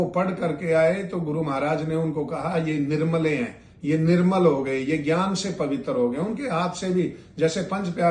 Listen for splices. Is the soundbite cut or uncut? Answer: uncut